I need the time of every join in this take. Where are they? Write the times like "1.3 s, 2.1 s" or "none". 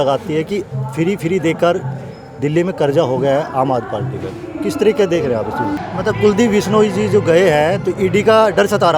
5.8 s